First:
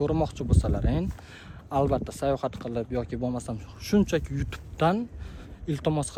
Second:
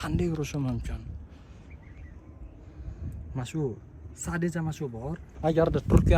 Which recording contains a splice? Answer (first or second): second